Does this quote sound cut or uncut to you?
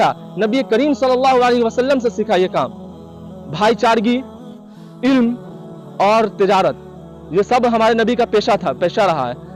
uncut